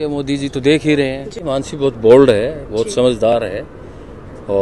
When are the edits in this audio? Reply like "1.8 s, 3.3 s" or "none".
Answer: 1.4 s

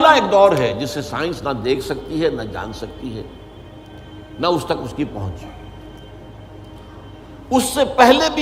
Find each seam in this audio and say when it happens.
none

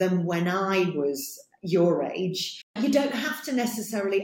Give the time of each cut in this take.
2.6 s

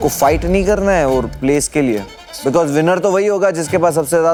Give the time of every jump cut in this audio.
none

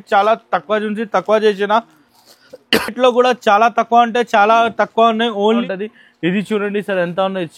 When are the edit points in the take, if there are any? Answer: 5.6 s

